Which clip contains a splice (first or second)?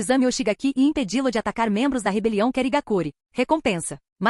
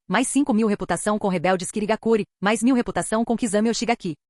first